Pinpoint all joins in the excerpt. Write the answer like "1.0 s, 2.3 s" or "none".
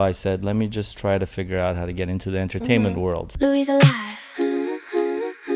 3.3 s